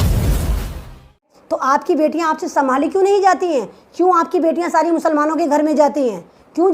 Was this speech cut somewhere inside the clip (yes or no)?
yes